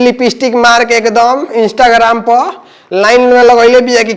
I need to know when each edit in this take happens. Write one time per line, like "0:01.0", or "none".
none